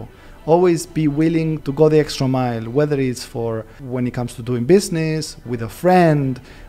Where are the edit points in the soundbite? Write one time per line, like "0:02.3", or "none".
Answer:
0:01.6
0:03.8